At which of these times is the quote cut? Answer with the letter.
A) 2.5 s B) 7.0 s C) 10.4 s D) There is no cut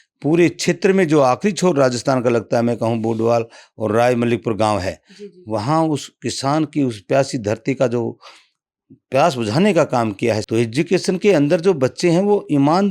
C